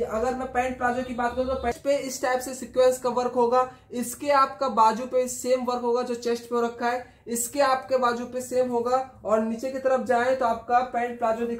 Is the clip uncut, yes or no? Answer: no